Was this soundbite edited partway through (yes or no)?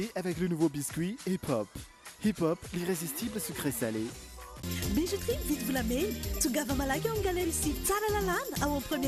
no